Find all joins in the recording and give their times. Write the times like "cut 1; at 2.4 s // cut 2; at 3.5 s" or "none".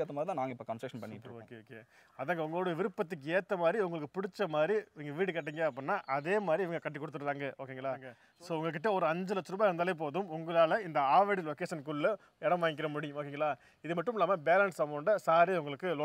cut 1; at 8.2 s